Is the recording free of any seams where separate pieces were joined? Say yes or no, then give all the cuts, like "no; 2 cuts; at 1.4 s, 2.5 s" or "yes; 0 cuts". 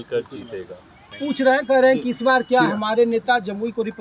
no; 1 cut; at 1.2 s